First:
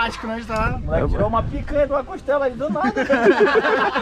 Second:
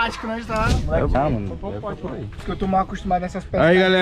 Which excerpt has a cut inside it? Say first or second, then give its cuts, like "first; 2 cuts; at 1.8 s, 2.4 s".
second; 1 cut; at 1.1 s